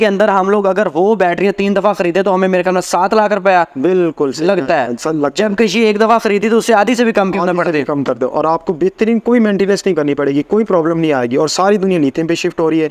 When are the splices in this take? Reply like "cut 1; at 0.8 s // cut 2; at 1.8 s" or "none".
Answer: none

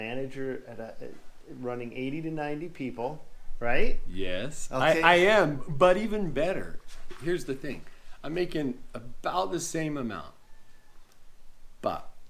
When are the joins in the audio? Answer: none

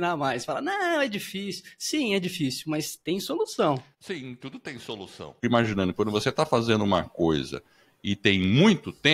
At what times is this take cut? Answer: cut 1; at 3.9 s // cut 2; at 5.3 s

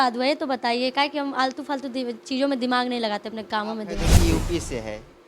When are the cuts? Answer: cut 1; at 4.0 s

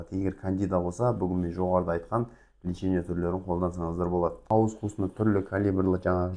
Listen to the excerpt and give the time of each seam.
cut 1; at 4.5 s

